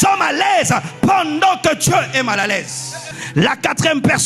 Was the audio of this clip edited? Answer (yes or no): yes